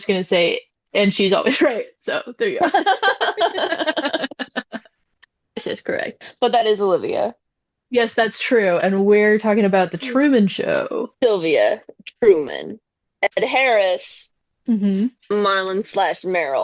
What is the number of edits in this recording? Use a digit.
1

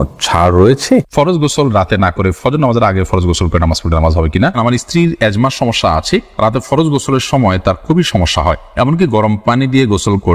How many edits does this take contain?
2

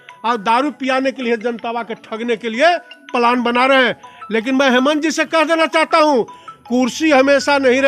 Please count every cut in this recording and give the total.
0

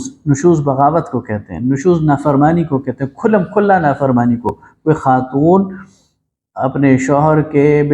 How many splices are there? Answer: 0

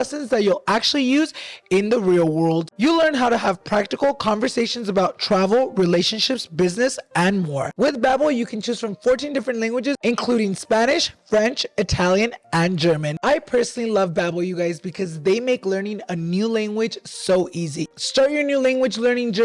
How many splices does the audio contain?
4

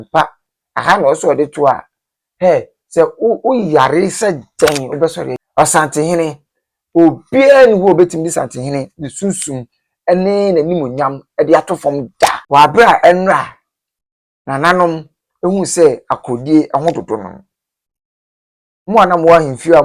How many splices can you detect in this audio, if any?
2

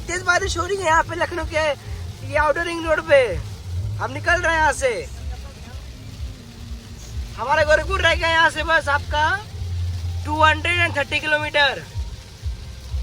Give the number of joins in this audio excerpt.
0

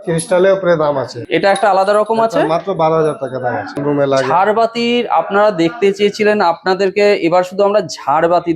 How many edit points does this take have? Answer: 2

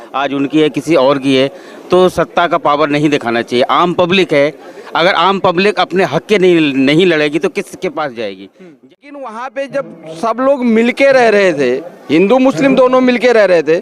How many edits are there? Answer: 1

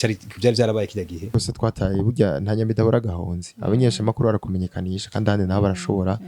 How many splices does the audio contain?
1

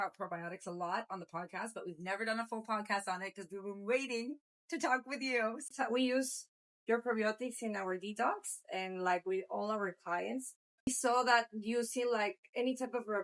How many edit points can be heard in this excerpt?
2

